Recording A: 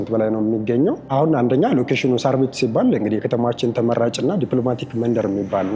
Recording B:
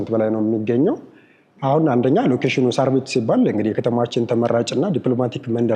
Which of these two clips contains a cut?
A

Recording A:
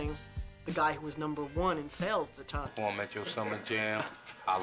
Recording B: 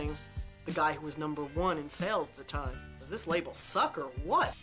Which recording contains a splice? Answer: B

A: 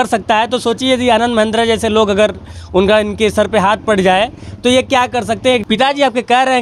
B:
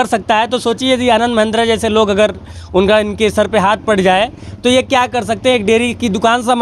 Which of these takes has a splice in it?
A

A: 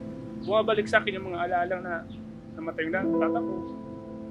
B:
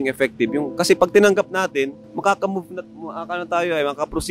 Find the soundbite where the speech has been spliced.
B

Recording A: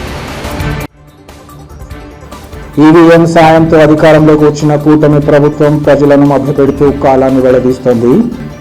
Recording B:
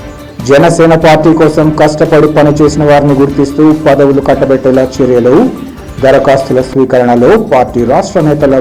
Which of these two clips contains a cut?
A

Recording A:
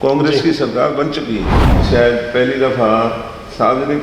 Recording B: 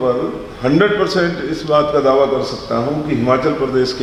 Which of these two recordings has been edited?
A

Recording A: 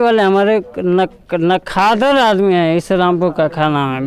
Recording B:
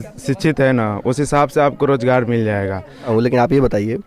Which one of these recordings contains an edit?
B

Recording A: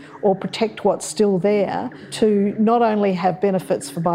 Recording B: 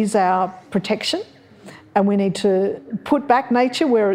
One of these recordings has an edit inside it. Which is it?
A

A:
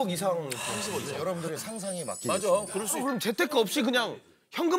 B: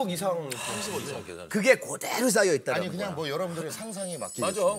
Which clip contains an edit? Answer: A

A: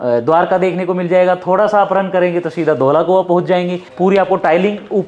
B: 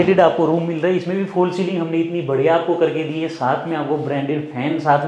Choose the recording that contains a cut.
A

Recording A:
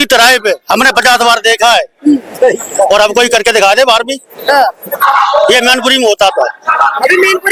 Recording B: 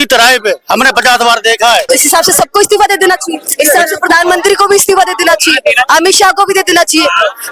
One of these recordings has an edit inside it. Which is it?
B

